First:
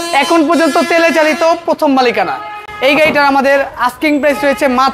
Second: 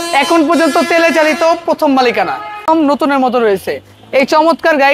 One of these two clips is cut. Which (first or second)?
second